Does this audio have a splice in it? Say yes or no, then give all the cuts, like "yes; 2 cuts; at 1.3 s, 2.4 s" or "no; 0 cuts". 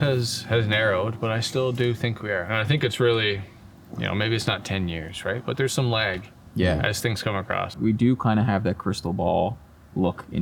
yes; 1 cut; at 7.7 s